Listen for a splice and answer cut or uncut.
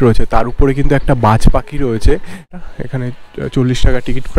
cut